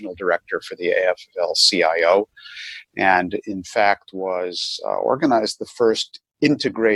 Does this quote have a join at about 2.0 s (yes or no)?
no